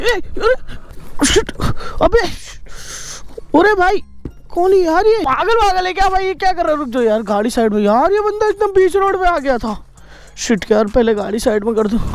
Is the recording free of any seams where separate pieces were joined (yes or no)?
yes